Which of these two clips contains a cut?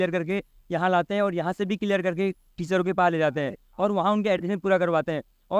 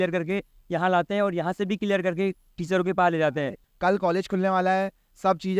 second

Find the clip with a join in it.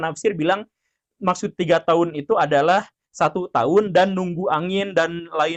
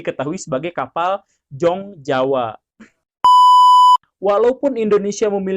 second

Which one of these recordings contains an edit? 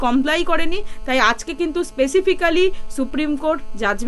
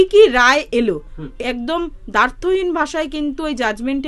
second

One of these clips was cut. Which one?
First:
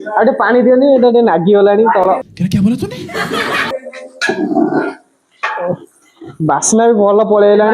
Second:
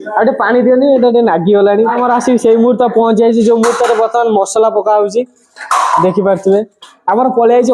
second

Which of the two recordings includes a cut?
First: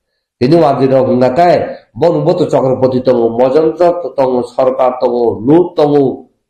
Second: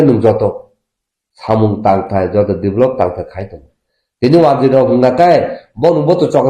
second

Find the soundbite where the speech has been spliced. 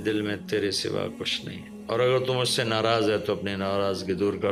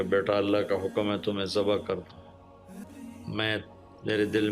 second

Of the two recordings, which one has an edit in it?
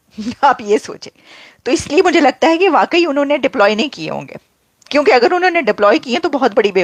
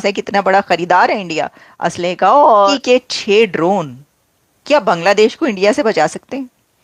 second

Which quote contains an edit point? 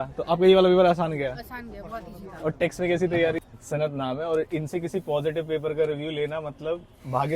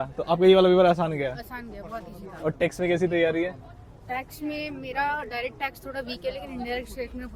first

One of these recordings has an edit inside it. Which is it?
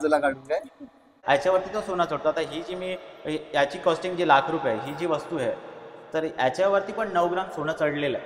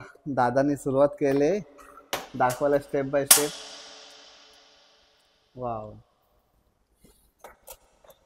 first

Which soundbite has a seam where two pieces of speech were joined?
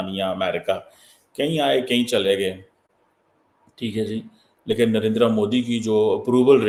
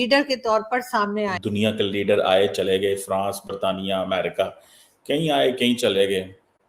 second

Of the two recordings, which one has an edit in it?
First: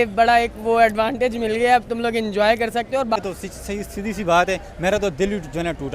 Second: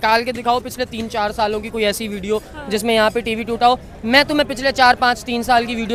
first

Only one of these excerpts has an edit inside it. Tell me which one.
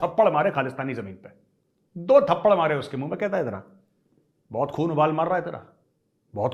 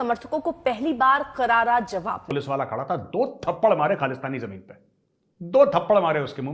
second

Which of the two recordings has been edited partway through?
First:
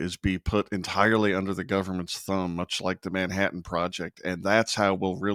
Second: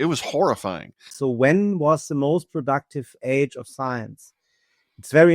second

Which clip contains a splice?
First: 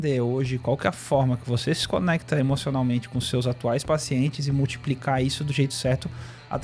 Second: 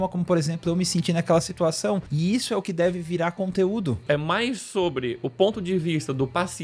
second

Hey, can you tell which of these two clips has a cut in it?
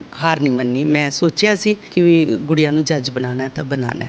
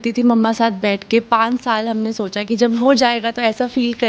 first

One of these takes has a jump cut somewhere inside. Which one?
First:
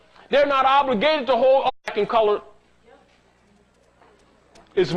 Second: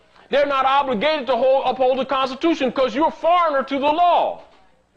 second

